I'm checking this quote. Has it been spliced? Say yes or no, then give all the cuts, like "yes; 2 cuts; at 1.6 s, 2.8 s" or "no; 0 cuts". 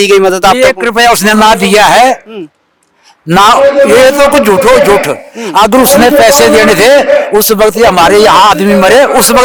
no; 0 cuts